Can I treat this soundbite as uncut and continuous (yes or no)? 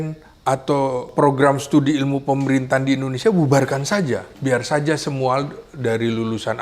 no